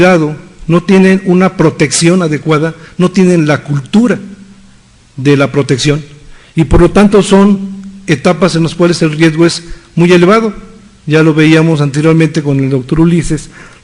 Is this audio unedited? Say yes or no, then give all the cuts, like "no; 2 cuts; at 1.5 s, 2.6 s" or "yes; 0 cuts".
no; 1 cut; at 10.5 s